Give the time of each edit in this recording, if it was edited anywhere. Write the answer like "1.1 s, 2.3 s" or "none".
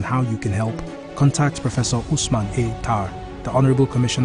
none

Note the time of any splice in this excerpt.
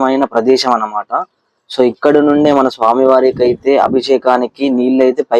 none

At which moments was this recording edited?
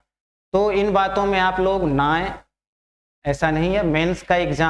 none

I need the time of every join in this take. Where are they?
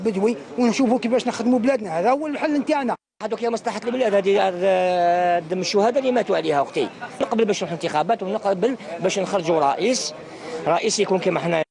3.2 s, 7.2 s

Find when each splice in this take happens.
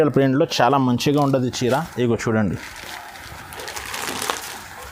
none

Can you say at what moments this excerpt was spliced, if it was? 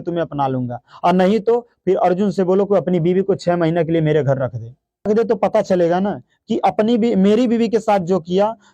5.1 s

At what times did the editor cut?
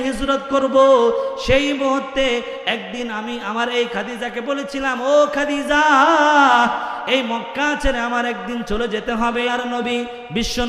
9.5 s

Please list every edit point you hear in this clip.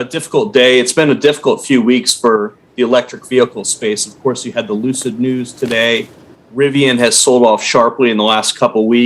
none

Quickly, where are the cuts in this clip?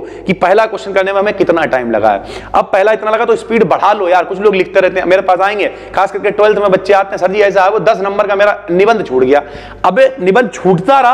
none

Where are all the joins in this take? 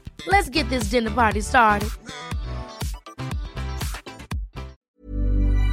4.8 s

